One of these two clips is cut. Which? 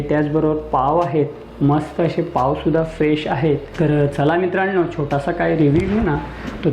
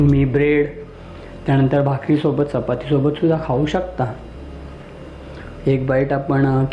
first; 1 cut; at 3.7 s

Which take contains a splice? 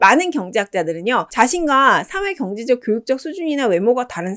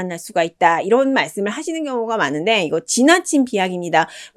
first; 1 cut; at 1.3 s

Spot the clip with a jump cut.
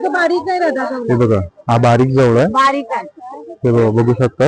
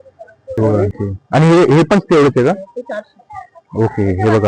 second; 1 cut; at 0.9 s

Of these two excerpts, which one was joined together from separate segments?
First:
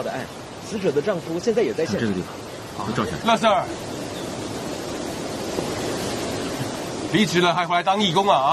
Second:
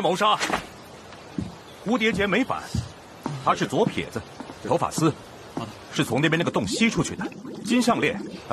first; 1 cut; at 2.0 s

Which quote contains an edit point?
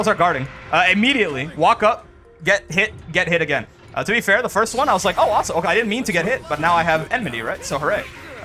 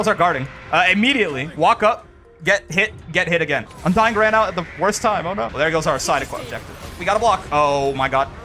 second; 3 cuts; at 3.7 s, 5.5 s, 6.9 s

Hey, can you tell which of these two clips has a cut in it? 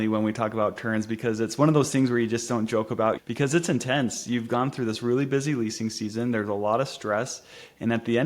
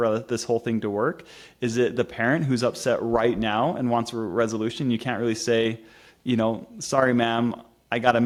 first; 1 cut; at 3.2 s

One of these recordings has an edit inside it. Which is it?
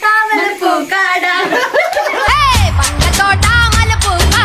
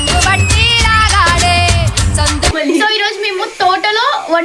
second; 1 cut; at 2.5 s

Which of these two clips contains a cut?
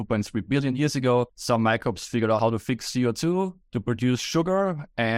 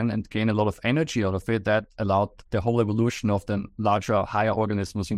first; 3 cuts; at 1.4 s, 2.4 s, 3.7 s

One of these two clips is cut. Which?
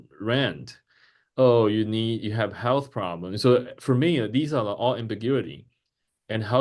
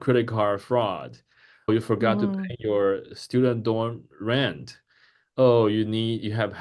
second; 1 cut; at 1.7 s

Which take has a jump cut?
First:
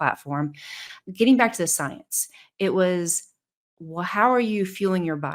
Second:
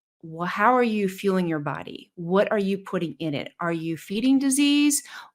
first; 1 cut; at 0.9 s

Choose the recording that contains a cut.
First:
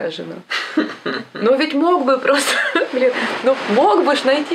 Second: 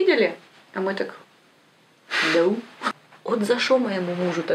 second; 1 cut; at 2.7 s

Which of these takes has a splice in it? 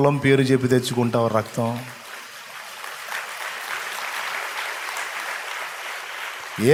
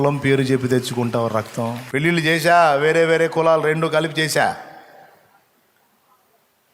second; 1 cut; at 1.8 s

